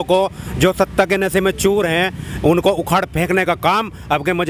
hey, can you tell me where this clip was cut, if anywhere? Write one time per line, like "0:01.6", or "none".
none